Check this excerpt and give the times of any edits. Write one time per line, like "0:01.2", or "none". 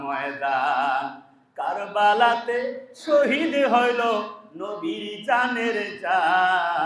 none